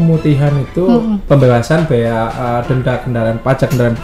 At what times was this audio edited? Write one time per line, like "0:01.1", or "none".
0:01.2